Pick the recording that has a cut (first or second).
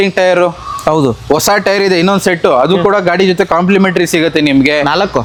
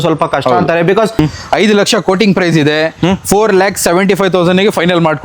second